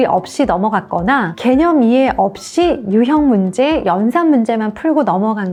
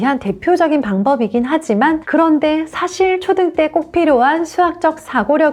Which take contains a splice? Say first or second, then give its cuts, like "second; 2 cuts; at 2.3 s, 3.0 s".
second; 1 cut; at 2.0 s